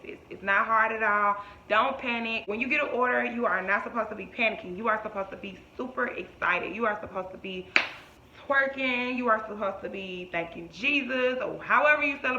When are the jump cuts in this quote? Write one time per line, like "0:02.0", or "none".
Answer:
0:02.4